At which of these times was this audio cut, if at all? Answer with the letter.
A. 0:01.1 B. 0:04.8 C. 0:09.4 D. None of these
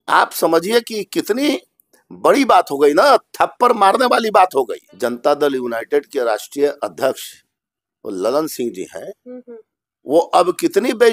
B